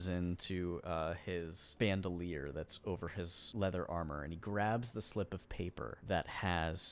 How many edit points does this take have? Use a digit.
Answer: 3